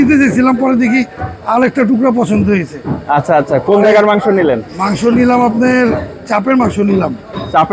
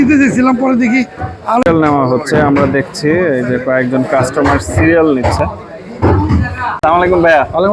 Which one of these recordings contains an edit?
second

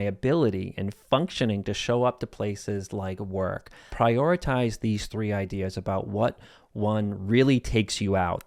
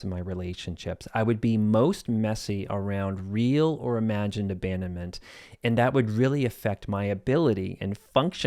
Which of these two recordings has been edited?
first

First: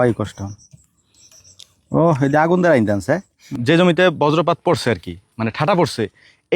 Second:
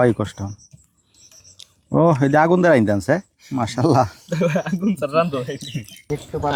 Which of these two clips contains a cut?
first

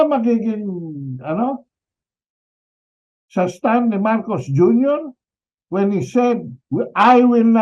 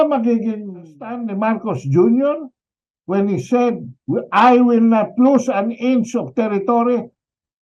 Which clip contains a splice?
second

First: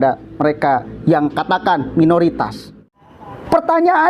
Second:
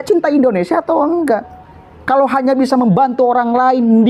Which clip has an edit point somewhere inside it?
first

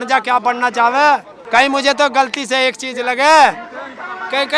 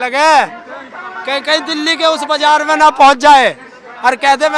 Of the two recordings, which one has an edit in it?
first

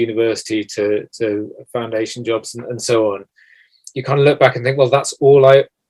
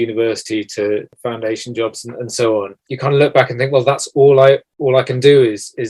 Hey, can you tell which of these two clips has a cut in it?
second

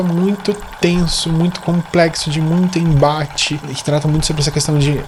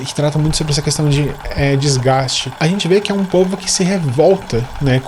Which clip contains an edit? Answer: second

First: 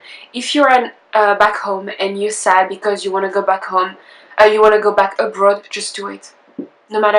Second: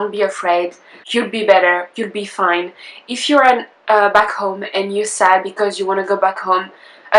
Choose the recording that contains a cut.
second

